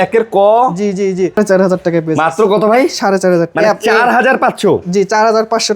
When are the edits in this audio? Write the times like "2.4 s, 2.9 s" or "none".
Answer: 1.4 s